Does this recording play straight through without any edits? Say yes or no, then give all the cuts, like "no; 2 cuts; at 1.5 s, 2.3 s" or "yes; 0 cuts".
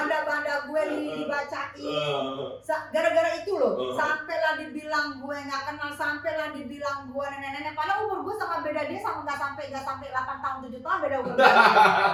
yes; 0 cuts